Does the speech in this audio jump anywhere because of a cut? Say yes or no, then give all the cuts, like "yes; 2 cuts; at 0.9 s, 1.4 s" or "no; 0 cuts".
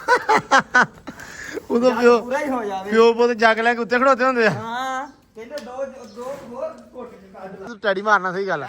yes; 1 cut; at 7.7 s